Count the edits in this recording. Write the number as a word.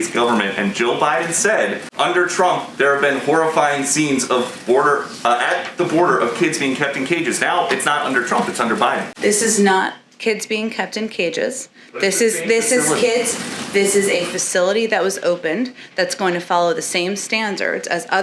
zero